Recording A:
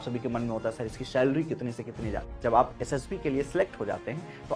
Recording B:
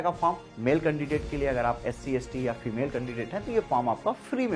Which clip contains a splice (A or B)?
A